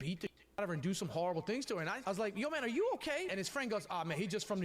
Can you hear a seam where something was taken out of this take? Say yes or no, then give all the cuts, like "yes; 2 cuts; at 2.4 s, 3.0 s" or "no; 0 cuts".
yes; 2 cuts; at 2.0 s, 3.3 s